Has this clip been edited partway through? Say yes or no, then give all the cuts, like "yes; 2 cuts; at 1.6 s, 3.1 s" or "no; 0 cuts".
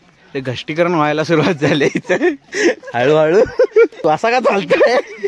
yes; 1 cut; at 4.0 s